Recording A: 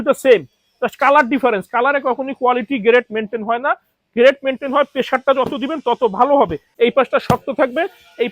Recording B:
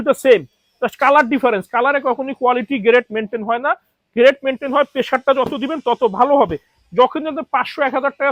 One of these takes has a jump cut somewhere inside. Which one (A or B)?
A